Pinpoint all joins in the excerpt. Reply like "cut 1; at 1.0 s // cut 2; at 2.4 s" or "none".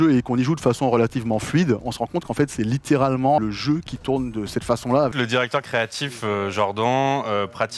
cut 1; at 3.4 s // cut 2; at 5.1 s